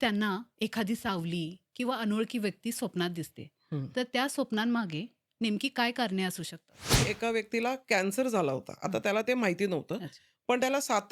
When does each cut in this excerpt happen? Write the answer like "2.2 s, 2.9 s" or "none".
7.0 s